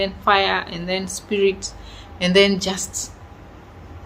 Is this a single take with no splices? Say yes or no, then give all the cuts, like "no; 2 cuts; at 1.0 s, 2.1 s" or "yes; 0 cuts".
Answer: yes; 0 cuts